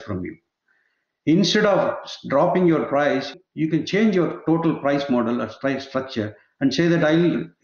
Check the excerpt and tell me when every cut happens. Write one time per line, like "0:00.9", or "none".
0:03.3